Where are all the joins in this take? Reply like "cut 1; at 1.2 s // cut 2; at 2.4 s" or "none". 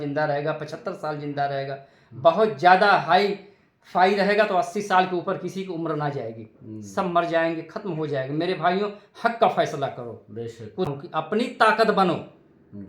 cut 1; at 10.9 s